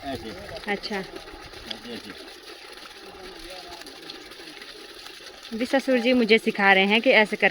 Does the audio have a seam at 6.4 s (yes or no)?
no